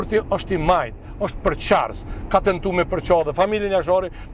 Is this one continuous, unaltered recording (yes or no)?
yes